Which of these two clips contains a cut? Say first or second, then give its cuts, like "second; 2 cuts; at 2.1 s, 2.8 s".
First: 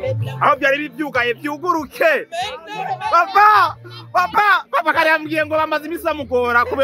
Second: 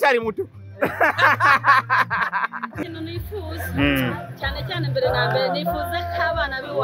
second; 1 cut; at 2.8 s